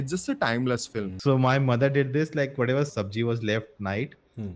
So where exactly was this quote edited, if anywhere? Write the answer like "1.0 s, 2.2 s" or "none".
1.1 s, 2.9 s